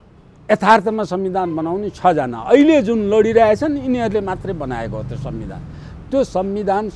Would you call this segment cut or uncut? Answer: uncut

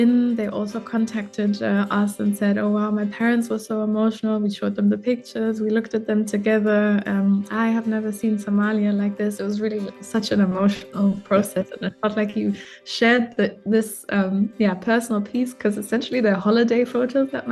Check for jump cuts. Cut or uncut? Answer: uncut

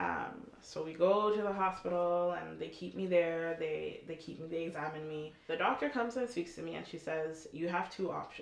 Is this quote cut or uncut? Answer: cut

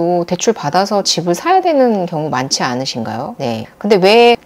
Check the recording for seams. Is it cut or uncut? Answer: uncut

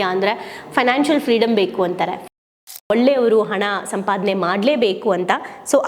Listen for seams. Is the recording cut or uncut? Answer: cut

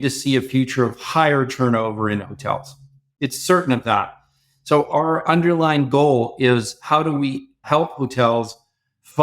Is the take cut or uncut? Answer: cut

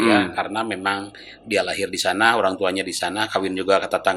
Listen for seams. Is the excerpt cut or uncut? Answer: uncut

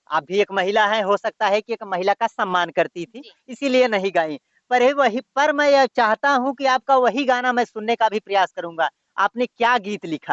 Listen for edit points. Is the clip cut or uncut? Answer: uncut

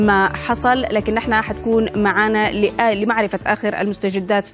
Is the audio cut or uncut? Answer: uncut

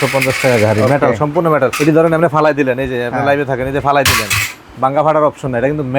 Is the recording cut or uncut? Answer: cut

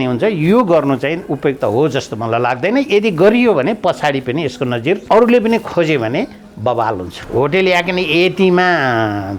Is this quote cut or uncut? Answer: cut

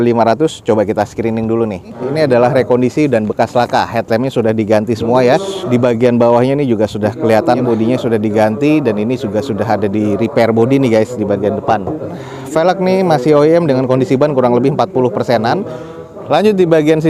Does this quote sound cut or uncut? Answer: uncut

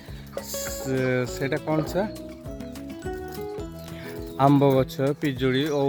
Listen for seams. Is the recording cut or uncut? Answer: uncut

